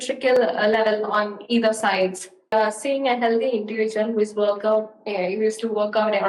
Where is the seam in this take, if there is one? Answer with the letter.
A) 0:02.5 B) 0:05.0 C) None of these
A